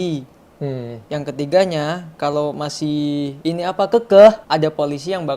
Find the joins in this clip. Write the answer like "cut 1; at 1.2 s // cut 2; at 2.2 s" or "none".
cut 1; at 3.3 s // cut 2; at 4.4 s